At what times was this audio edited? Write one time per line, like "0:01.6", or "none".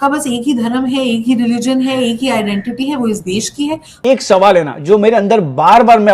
0:04.0